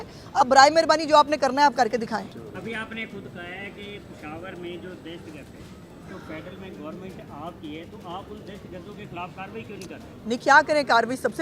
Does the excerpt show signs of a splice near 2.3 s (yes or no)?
yes